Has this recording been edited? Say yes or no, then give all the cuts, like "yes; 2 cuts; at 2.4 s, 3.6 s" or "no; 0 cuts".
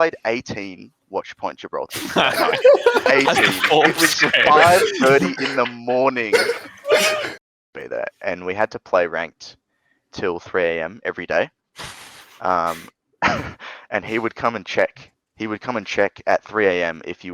yes; 1 cut; at 7.4 s